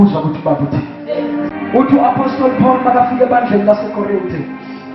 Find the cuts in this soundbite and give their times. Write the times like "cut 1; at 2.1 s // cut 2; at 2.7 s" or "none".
cut 1; at 1.5 s